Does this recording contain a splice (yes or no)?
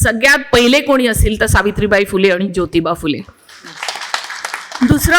no